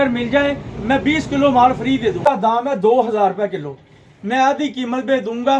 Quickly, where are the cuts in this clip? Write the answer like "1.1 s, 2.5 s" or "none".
2.5 s

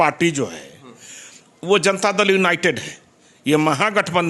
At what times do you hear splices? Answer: none

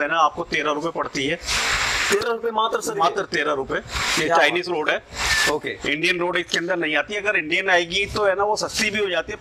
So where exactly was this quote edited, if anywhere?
none

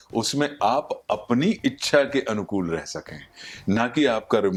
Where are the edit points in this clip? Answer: none

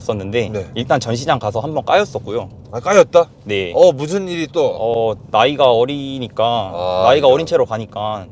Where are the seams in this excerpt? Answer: none

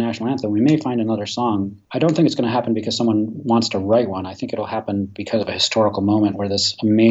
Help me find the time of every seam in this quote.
1.8 s

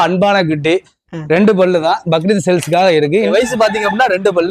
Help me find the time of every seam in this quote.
3.3 s

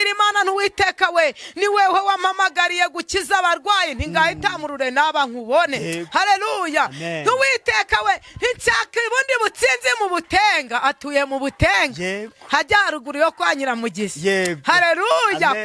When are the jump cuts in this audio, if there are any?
none

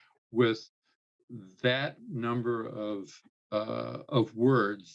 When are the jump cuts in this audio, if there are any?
none

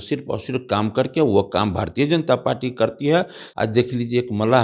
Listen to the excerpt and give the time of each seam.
3.4 s

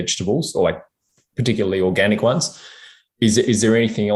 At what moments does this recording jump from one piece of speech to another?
none

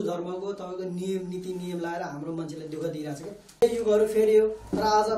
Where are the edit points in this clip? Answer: 3.6 s

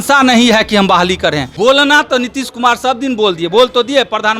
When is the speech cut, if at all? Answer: 1.5 s

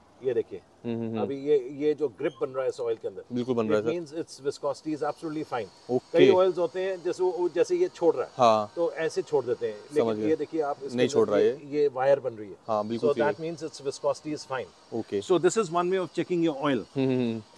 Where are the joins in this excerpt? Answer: none

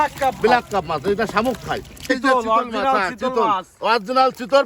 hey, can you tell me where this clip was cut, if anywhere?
2.1 s

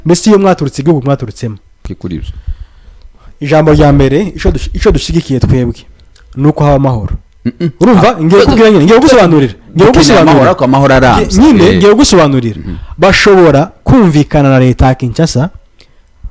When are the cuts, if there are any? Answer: 1.9 s

